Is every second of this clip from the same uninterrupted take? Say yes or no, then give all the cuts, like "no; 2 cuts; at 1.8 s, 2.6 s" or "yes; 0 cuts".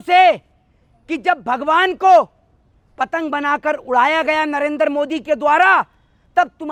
yes; 0 cuts